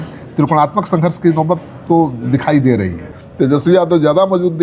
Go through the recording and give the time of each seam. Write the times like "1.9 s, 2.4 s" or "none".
3.6 s